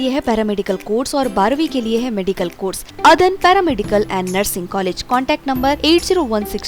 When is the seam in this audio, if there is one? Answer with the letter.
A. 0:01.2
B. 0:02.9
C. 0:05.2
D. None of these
B